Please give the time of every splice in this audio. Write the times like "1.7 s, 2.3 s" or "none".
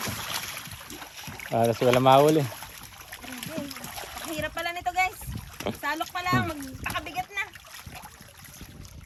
none